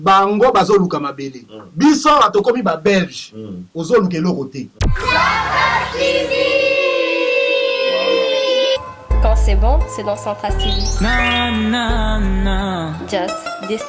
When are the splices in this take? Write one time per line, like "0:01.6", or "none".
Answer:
0:04.9